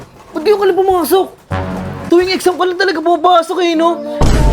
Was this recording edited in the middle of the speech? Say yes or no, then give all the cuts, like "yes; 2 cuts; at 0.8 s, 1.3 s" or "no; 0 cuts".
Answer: yes; 1 cut; at 1.9 s